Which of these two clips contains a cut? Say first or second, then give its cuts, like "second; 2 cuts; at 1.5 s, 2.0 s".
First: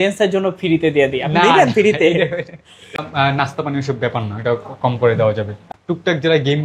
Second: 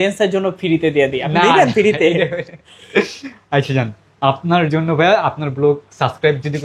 first; 2 cuts; at 3.0 s, 5.7 s